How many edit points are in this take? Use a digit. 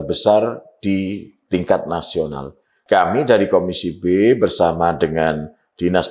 1